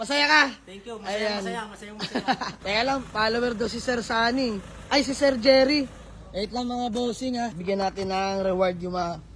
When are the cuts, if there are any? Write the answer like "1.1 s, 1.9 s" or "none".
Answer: 2.5 s, 7.6 s